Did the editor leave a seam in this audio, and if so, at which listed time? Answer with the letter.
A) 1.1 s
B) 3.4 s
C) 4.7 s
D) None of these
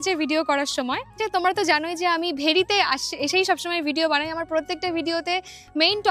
A